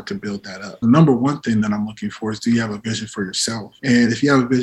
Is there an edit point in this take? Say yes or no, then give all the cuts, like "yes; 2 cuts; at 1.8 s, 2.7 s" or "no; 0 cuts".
yes; 2 cuts; at 0.8 s, 3.7 s